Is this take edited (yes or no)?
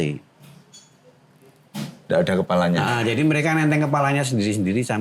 no